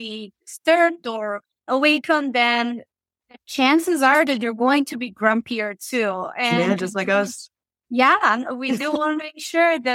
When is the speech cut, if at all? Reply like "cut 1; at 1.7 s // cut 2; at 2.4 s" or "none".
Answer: cut 1; at 1.6 s

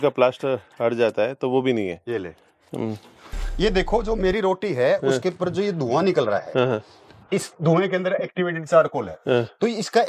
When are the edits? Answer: cut 1; at 3.5 s

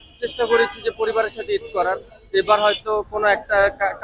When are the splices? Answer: none

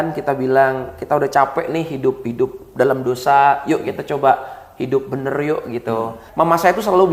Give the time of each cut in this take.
cut 1; at 6.2 s

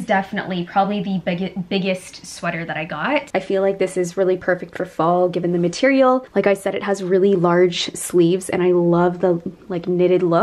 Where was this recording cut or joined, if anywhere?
cut 1; at 3.3 s // cut 2; at 6.3 s

